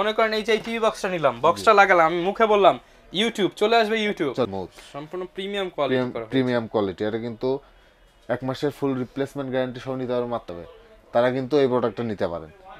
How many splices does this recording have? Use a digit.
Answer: 2